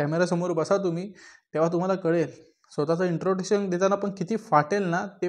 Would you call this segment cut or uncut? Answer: uncut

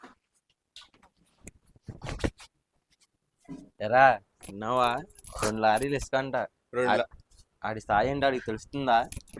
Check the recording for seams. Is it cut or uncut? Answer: cut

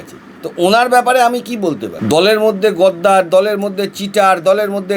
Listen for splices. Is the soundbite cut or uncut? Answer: cut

